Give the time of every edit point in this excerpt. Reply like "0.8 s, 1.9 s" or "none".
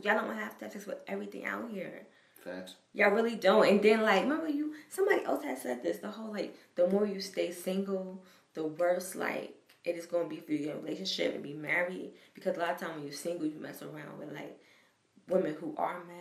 none